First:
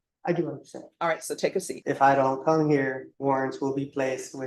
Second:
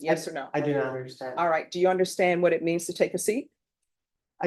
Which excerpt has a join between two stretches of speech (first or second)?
first